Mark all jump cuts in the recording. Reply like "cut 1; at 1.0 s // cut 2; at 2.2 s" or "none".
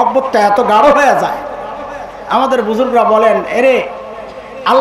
none